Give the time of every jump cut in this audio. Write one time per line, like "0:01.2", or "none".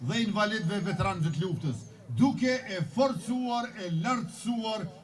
none